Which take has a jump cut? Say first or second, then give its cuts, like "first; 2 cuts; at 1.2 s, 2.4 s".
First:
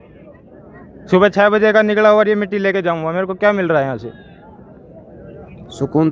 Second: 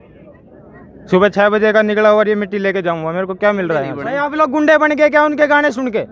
second; 1 cut; at 4.3 s